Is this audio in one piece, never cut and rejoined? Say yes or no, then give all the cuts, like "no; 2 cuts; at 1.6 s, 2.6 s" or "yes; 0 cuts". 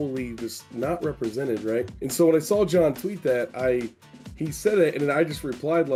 yes; 0 cuts